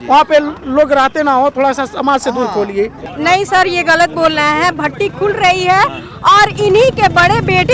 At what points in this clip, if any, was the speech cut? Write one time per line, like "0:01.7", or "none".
0:03.1